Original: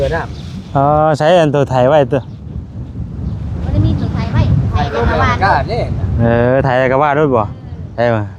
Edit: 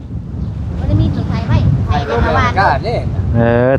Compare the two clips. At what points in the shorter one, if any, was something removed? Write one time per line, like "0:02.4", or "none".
none